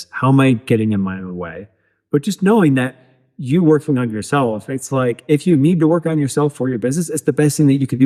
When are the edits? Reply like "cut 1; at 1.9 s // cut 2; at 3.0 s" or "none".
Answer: none

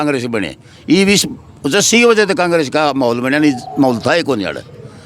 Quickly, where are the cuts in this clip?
none

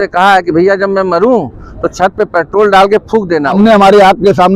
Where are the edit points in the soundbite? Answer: cut 1; at 3.5 s

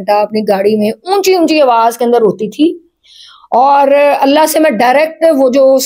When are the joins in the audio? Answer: none

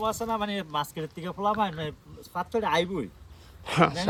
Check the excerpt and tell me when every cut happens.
none

